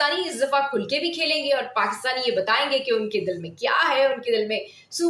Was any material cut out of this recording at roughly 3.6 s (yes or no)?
no